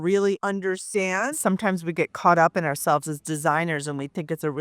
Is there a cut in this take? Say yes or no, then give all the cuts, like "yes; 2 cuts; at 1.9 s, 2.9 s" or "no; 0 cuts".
yes; 1 cut; at 1.4 s